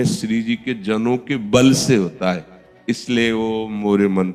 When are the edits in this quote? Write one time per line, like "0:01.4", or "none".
none